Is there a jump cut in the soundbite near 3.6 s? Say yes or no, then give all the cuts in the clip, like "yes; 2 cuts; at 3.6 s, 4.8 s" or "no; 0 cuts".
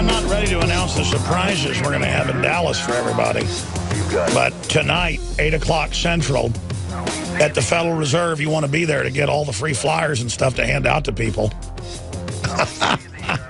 yes; 1 cut; at 3.6 s